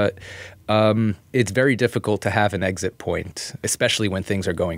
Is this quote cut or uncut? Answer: cut